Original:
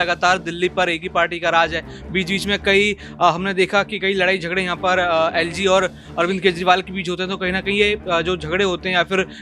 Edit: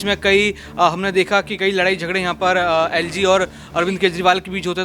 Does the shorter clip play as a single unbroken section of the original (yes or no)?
yes